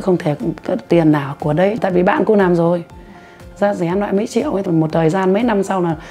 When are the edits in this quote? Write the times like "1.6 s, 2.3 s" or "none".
1.8 s, 4.6 s